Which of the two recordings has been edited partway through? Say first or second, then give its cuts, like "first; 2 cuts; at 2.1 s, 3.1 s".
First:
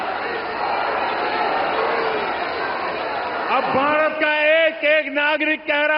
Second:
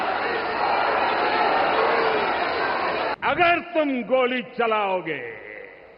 second; 1 cut; at 3.1 s